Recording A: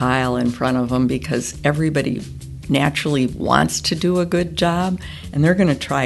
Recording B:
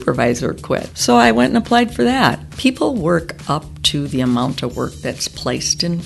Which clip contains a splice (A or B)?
B